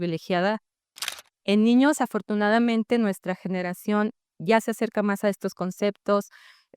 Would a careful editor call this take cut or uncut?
cut